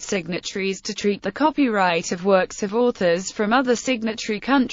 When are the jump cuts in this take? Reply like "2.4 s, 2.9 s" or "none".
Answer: 1.6 s